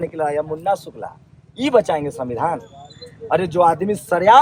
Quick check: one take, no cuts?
yes; 0 cuts

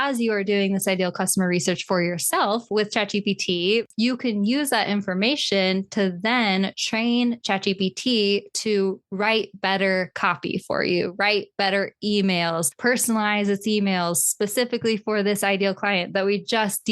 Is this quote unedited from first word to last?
no; 1 cut; at 3.9 s

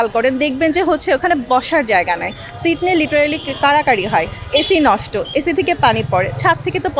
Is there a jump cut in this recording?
no; 0 cuts

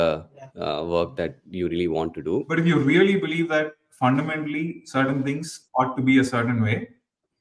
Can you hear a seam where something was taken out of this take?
yes; 1 cut; at 2.5 s

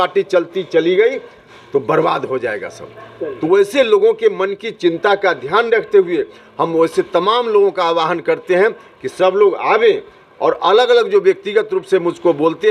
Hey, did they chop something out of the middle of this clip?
no; 0 cuts

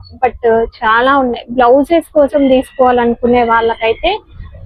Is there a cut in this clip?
no; 0 cuts

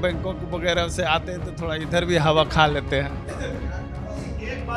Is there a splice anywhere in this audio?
no; 0 cuts

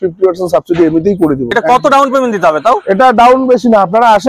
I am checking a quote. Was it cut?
yes; 1 cut; at 1.5 s

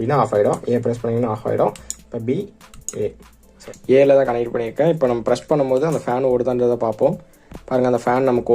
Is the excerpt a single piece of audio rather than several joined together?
no; 1 cut; at 3.5 s

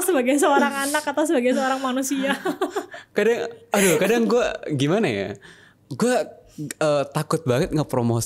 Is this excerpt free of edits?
yes; 0 cuts

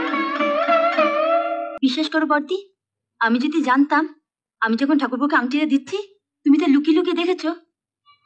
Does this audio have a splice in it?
yes; 1 cut; at 1.7 s

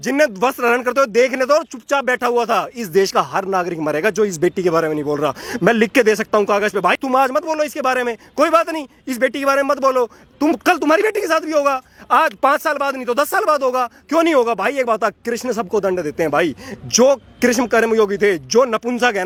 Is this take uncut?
yes; 0 cuts

